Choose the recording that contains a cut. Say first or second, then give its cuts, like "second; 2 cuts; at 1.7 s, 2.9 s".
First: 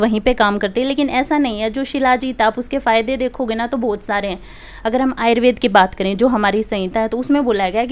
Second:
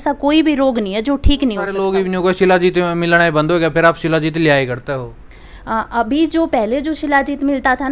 second; 1 cut; at 1.7 s